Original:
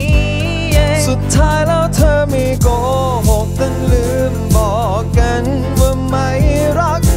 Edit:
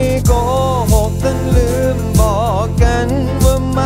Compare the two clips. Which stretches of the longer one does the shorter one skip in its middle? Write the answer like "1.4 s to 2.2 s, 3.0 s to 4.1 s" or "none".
none